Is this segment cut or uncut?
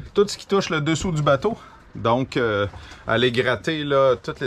uncut